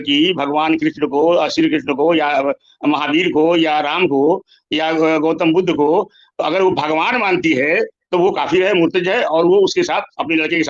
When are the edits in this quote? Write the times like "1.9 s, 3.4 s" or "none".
none